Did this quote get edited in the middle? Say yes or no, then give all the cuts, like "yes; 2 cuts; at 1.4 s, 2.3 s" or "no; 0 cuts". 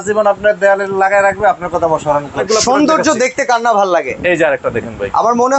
yes; 1 cut; at 2.4 s